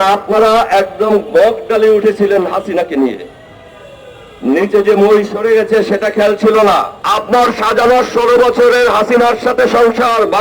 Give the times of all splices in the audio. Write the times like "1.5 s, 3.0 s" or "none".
7.0 s